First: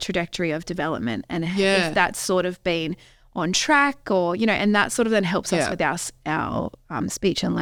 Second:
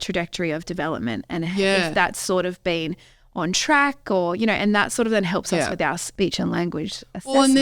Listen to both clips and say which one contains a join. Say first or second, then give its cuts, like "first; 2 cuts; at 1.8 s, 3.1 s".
second; 1 cut; at 6.1 s